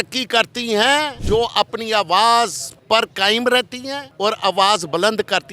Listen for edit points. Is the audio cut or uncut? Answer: cut